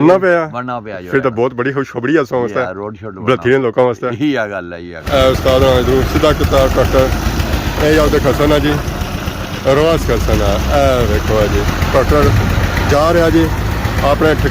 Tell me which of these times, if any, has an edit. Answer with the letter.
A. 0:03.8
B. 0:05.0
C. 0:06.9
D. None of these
B